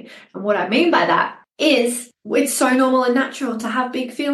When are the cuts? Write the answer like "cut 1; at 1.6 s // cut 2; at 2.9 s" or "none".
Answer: cut 1; at 1.4 s // cut 2; at 2.1 s